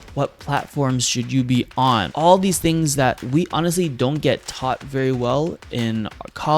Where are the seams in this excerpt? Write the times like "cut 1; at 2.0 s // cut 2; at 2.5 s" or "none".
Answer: cut 1; at 2.1 s // cut 2; at 3.2 s